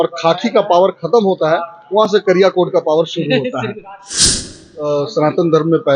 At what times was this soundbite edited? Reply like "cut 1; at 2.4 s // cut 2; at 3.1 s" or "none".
cut 1; at 4.2 s